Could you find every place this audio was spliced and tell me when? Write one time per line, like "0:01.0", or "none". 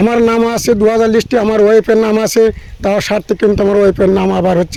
none